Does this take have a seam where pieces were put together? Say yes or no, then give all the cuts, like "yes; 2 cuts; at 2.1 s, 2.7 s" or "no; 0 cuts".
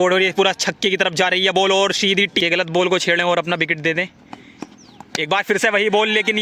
yes; 1 cut; at 2.3 s